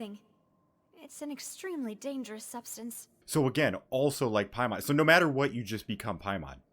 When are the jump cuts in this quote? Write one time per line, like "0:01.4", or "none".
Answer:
0:03.1